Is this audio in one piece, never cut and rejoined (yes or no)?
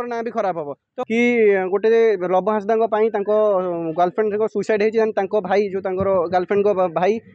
no